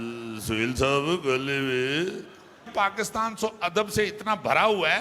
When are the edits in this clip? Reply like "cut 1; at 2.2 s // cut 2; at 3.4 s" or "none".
cut 1; at 2.7 s